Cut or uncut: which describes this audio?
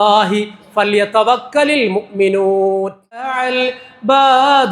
cut